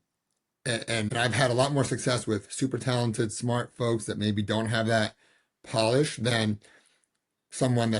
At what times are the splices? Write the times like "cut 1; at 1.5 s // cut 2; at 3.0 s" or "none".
cut 1; at 1.1 s